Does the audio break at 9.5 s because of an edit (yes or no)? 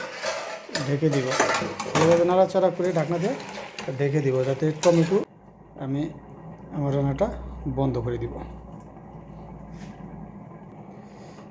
no